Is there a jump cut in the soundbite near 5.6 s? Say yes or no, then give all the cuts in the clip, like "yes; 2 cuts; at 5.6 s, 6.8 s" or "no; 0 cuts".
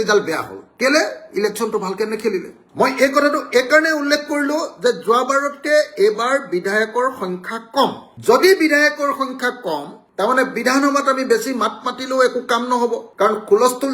no; 1 cut; at 2.6 s